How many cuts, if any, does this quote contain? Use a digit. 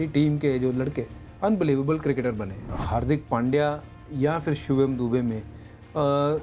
1